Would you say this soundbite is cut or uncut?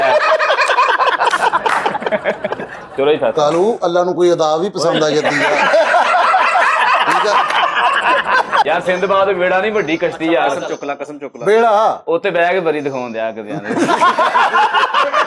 cut